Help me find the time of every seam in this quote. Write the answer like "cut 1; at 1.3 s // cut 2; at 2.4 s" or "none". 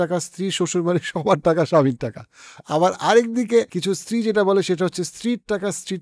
cut 1; at 3.7 s